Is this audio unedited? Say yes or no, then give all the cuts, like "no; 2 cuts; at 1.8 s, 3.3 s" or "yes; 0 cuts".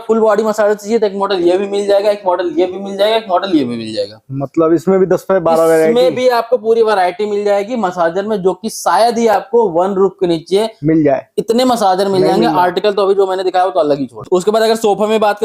no; 1 cut; at 14.2 s